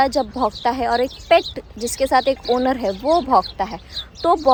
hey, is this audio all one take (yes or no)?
yes